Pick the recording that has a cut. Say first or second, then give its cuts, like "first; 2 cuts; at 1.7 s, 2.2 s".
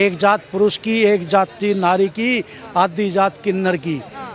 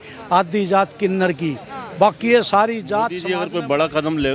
second; 1 cut; at 3.3 s